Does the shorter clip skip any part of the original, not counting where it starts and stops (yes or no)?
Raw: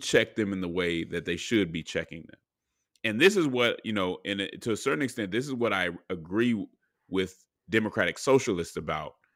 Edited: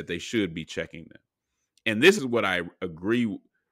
yes